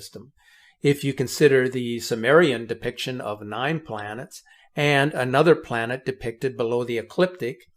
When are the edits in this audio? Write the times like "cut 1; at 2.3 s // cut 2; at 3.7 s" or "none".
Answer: none